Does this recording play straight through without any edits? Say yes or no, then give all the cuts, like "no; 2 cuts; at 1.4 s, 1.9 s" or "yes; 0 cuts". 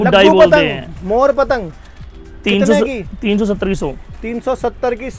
yes; 0 cuts